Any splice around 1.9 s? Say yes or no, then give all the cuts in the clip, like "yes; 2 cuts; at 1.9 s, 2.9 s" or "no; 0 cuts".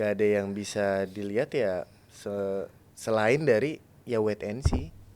no; 0 cuts